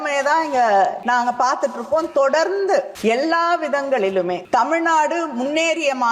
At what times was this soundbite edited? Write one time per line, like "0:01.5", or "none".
0:01.0
0:02.9
0:04.4